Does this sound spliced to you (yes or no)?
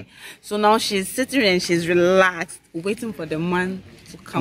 no